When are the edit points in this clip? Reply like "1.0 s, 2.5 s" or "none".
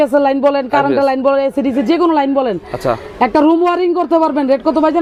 none